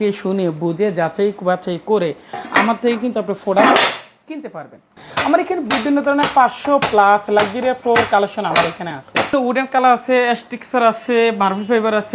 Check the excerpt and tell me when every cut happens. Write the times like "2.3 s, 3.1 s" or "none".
5.0 s, 9.3 s